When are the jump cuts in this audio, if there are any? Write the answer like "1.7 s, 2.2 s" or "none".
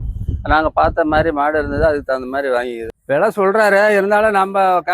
2.9 s